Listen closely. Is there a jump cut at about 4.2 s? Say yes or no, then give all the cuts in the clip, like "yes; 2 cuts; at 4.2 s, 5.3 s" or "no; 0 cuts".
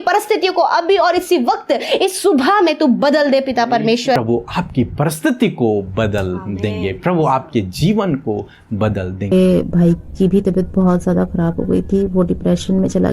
yes; 2 cuts; at 4.2 s, 9.3 s